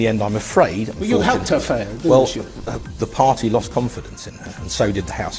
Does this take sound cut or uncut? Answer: uncut